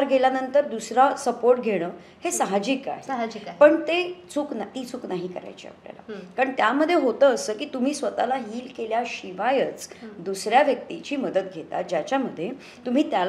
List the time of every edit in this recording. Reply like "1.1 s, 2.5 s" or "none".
none